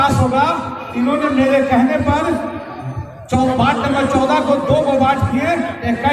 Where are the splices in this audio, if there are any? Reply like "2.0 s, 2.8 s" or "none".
none